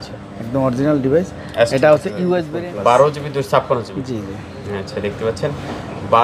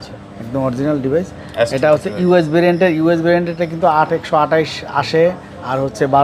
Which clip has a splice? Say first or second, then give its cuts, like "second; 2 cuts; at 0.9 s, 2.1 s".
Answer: first; 1 cut; at 2.4 s